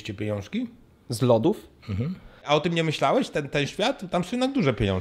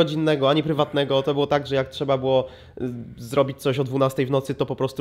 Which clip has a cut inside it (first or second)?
first